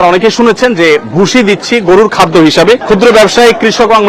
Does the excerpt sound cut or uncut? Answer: cut